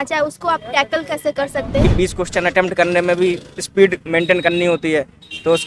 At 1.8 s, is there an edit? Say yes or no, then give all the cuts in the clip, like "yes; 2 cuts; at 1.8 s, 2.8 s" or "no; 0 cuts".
yes; 1 cut; at 1.8 s